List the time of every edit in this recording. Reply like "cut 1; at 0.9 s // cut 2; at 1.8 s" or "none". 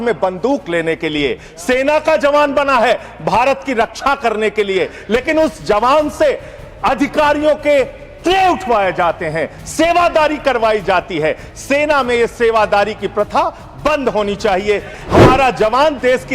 cut 1; at 14.9 s